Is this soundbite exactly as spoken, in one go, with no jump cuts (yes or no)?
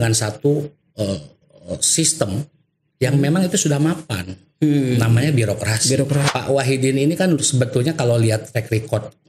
no